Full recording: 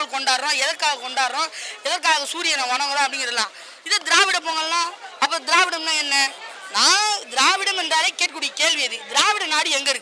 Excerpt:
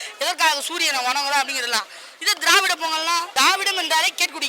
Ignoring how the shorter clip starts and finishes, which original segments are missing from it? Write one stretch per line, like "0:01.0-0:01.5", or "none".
0:04.9-0:07.3